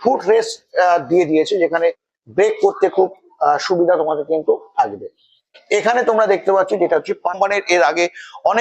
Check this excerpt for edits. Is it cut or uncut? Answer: cut